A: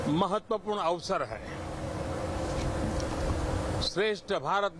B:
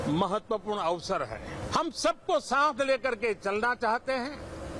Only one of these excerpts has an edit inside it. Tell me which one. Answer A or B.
B